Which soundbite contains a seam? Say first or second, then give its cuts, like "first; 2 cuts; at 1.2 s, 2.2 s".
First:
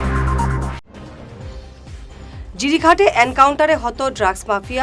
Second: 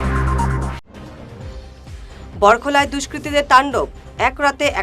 second; 1 cut; at 1.8 s